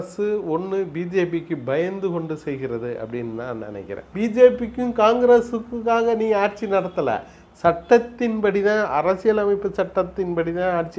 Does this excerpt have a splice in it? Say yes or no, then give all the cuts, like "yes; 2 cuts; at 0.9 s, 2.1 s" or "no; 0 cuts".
yes; 1 cut; at 4.0 s